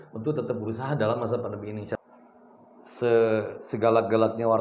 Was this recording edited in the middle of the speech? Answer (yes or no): yes